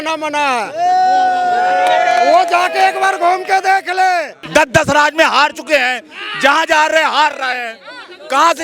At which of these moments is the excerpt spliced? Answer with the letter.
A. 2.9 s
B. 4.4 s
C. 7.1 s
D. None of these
B